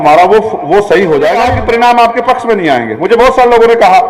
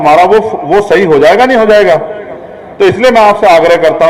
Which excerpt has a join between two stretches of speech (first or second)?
first